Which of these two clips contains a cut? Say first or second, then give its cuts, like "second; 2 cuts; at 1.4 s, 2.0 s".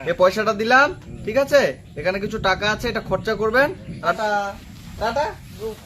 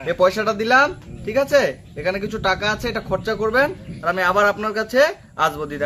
first; 1 cut; at 4.1 s